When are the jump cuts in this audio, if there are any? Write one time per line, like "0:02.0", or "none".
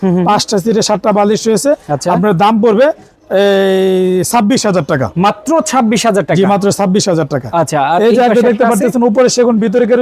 none